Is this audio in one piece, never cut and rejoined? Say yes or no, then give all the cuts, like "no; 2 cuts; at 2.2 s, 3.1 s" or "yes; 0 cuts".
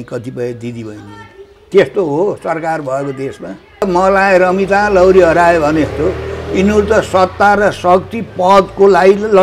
no; 1 cut; at 3.8 s